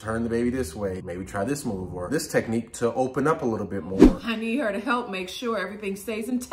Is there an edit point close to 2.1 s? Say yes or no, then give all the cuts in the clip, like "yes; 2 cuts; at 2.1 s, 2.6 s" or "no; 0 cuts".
yes; 3 cuts; at 1.0 s, 2.1 s, 4.0 s